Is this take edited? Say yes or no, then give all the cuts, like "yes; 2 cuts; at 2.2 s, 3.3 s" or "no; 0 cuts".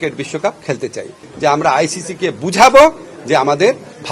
yes; 1 cut; at 1.3 s